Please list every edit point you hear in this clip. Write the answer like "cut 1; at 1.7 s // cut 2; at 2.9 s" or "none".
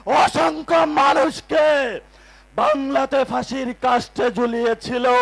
none

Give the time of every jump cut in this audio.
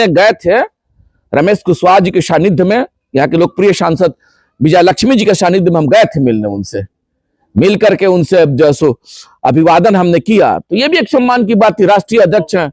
none

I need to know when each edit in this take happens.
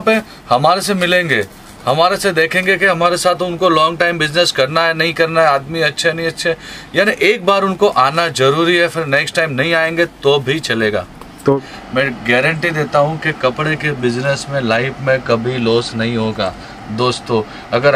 cut 1; at 11.6 s

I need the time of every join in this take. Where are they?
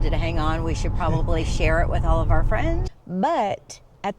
cut 1; at 2.9 s

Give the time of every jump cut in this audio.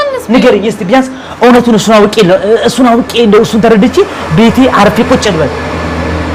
none

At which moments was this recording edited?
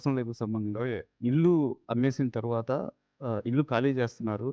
cut 1; at 1.1 s

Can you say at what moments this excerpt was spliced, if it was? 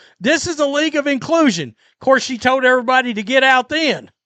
none

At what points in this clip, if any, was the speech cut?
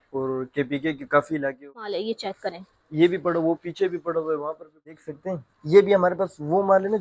cut 1; at 1.7 s // cut 2; at 5.0 s

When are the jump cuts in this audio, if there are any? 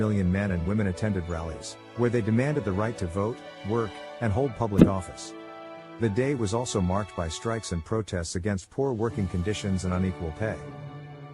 none

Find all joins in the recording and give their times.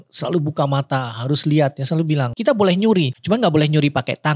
cut 1; at 2.3 s // cut 2; at 3.2 s

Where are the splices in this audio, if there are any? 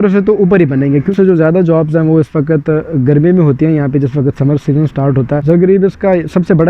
cut 1; at 1.1 s // cut 2; at 5.4 s

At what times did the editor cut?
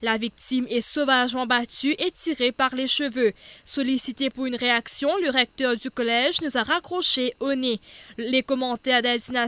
cut 1; at 1.4 s

